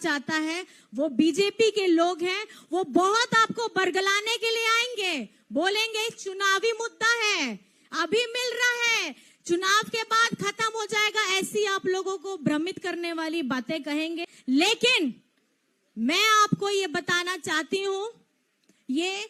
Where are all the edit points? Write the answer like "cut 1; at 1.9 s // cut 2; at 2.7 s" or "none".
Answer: cut 1; at 14.3 s